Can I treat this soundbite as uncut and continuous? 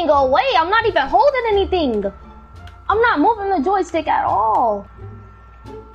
no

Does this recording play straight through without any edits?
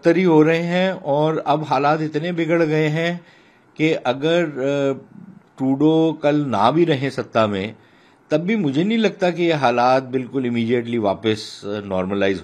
yes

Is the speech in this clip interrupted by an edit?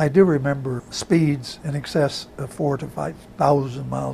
yes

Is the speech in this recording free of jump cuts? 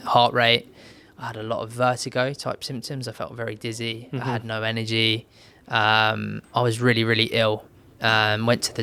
yes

